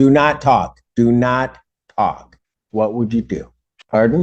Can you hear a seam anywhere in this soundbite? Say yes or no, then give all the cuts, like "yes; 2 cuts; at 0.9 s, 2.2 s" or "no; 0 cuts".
no; 0 cuts